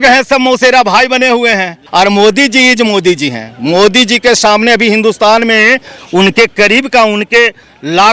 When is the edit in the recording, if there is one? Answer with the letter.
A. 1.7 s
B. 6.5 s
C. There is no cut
A